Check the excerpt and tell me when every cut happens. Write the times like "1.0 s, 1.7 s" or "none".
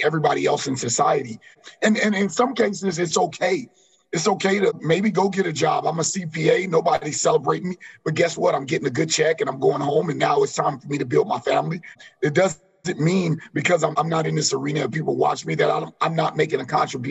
1.7 s, 4.8 s, 12.0 s, 13.9 s